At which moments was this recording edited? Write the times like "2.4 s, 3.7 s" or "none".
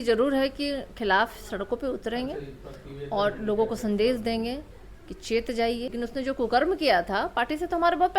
5.9 s